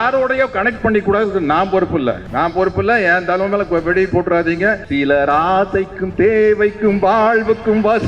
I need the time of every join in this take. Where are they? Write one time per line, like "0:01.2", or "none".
0:02.2
0:04.8